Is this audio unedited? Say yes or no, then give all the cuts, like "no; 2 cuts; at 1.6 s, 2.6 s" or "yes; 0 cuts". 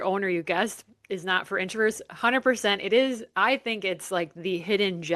yes; 0 cuts